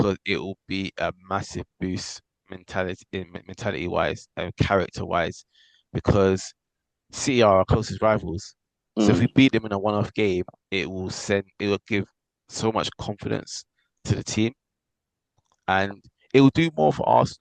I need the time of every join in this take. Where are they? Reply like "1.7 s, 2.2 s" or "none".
none